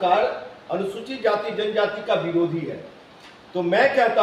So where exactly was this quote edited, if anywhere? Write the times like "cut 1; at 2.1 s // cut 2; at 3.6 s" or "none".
none